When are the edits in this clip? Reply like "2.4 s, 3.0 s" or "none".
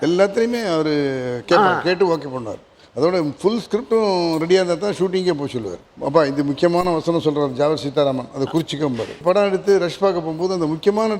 5.8 s, 9.2 s

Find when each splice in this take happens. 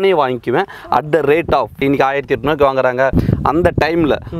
1.7 s, 3.1 s

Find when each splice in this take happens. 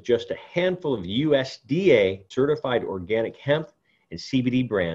2.3 s

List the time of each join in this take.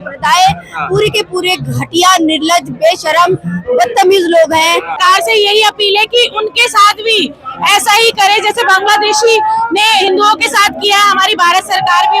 5.0 s

